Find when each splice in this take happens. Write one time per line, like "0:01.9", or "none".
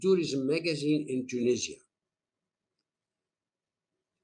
none